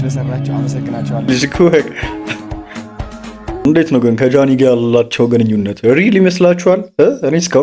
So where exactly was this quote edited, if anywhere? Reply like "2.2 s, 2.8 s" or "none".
1.3 s, 3.6 s